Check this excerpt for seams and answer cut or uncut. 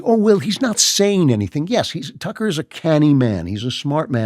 uncut